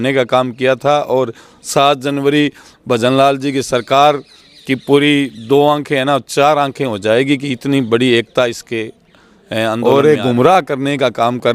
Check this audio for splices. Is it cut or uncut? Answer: cut